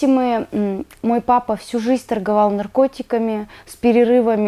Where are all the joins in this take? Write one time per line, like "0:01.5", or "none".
none